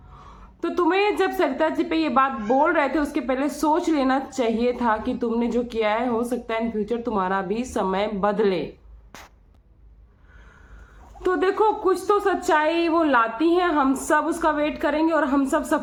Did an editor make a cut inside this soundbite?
no; 0 cuts

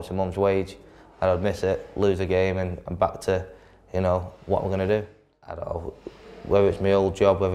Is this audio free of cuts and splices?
no; 1 cut; at 5.6 s

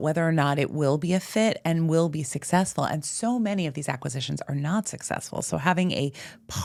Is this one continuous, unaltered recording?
yes; 0 cuts

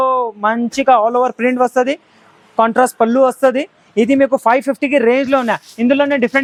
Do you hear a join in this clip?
no; 0 cuts

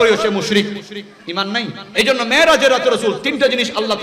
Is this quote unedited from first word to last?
no; 1 cut; at 1.8 s

